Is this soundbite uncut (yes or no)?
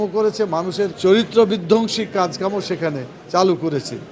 no